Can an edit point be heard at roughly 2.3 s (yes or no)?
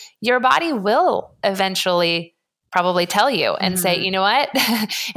no